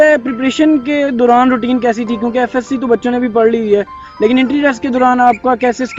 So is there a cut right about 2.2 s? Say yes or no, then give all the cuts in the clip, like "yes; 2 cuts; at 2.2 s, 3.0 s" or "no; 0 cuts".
no; 0 cuts